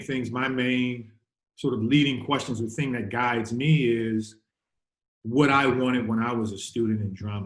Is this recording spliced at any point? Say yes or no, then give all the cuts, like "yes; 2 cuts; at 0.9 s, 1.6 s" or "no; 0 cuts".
no; 0 cuts